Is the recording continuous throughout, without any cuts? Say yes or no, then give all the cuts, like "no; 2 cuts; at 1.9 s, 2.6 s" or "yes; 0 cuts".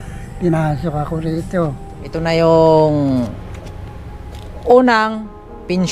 no; 1 cut; at 2.2 s